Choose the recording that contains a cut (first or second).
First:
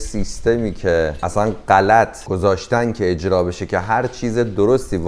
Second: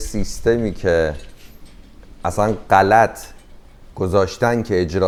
first